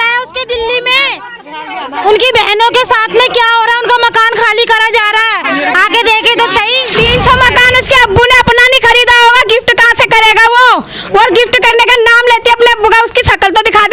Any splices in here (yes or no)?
yes